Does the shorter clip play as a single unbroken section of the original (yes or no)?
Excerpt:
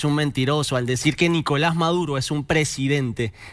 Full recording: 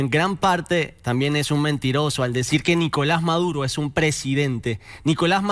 yes